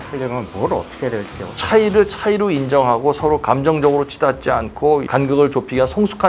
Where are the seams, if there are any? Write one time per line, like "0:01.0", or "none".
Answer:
0:01.5